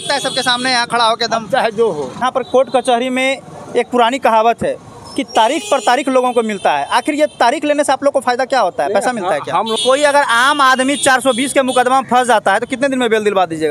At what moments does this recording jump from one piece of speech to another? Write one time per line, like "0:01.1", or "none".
0:02.2
0:09.8